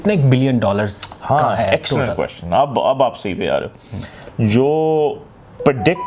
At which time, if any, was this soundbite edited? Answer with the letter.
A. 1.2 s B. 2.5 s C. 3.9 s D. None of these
D